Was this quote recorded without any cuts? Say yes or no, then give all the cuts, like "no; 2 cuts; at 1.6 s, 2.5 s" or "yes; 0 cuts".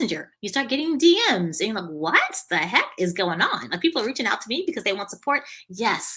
yes; 0 cuts